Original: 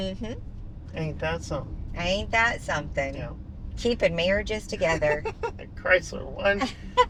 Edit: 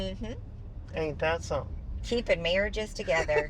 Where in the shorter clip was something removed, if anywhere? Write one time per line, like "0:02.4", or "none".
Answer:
0:01.8